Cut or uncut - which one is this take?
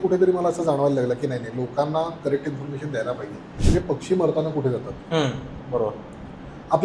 cut